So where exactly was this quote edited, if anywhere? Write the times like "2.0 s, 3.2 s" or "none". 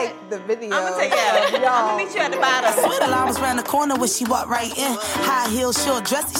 2.9 s